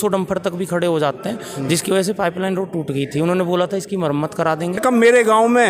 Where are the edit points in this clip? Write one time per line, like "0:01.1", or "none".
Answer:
0:04.8